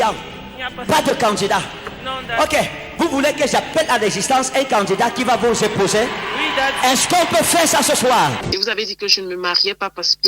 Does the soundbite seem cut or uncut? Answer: cut